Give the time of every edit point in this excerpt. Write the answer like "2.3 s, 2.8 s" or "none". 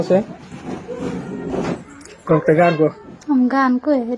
1.5 s